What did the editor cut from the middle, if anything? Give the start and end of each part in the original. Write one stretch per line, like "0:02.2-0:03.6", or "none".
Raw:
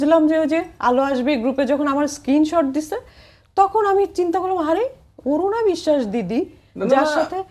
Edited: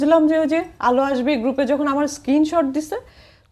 none